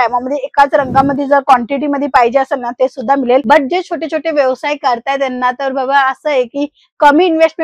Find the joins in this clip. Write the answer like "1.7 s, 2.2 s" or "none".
none